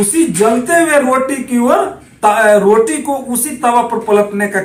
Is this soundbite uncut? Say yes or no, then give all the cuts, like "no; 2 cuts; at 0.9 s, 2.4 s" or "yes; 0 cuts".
yes; 0 cuts